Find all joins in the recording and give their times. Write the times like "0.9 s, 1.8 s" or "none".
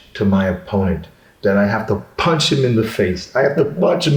none